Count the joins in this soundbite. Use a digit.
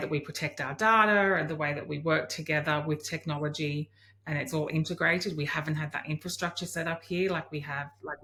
0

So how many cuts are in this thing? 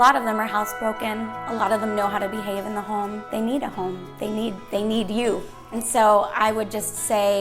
2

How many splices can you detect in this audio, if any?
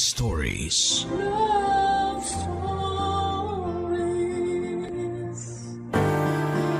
1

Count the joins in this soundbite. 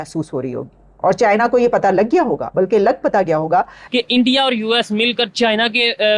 1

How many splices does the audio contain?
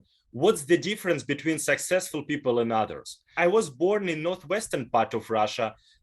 1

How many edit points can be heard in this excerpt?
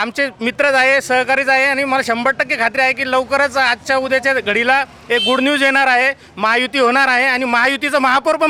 0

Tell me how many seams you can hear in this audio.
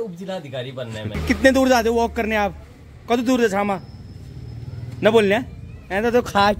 1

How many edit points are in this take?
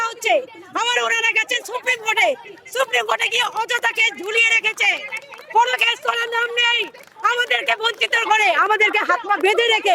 0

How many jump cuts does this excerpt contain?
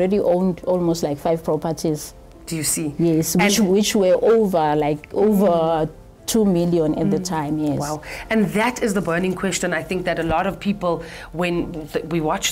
0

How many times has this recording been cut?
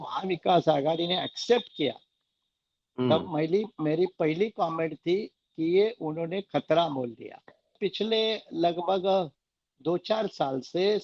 1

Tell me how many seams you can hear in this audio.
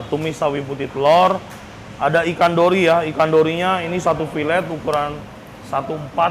0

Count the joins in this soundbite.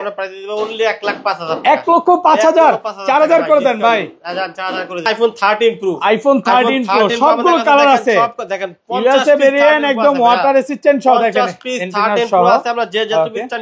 1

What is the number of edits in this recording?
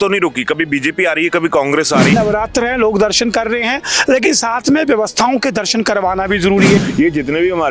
2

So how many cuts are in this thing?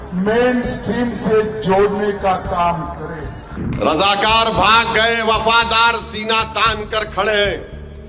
1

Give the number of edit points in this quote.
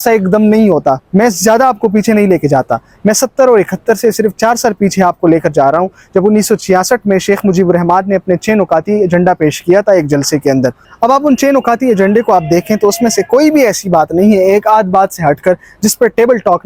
0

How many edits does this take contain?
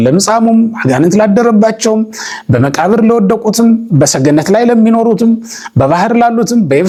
0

